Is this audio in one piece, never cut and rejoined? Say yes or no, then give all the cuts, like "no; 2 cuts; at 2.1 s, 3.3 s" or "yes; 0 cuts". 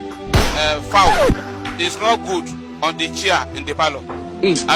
yes; 0 cuts